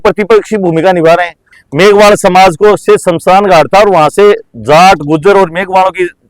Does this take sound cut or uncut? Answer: cut